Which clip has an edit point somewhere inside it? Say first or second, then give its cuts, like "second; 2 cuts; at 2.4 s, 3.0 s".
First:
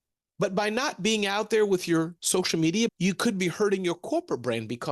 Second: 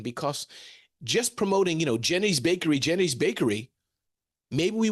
first; 1 cut; at 2.9 s